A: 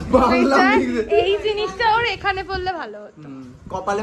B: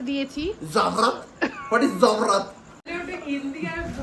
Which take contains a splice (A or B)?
B